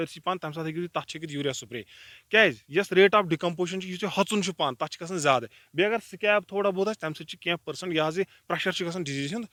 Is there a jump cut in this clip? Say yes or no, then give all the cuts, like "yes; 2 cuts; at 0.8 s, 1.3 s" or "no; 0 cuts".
no; 0 cuts